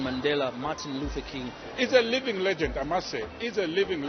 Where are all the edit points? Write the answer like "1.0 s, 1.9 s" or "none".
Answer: 1.6 s